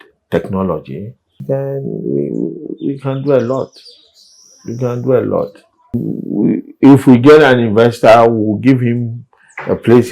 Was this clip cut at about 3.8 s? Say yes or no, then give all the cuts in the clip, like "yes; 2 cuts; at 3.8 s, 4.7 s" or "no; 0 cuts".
no; 2 cuts; at 1.4 s, 6.1 s